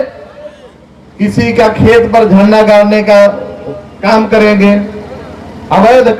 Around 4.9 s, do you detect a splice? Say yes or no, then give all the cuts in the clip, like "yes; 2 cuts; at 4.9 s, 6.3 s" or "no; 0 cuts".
no; 0 cuts